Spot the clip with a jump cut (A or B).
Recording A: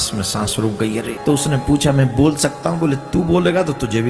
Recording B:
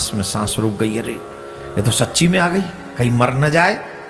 A